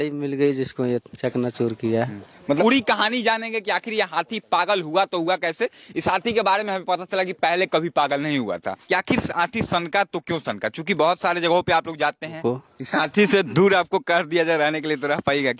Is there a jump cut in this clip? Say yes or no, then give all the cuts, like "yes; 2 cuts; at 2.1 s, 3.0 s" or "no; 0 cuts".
yes; 3 cuts; at 2.4 s, 8.7 s, 12.4 s